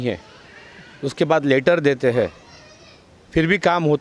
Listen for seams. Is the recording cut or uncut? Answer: uncut